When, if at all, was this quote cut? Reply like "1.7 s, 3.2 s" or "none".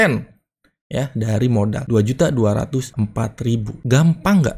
1.8 s, 3.3 s